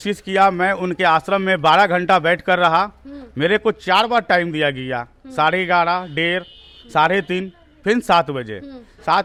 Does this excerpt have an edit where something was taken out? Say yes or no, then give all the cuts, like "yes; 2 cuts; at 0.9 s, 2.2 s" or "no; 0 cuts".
no; 0 cuts